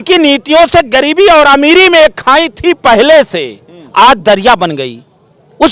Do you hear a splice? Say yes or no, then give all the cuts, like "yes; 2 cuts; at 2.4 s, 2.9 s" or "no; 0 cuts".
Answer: no; 0 cuts